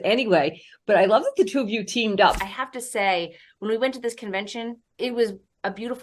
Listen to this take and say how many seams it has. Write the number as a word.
two